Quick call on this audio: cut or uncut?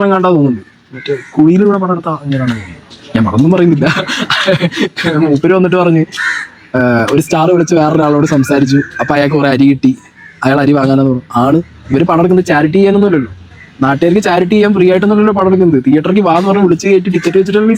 uncut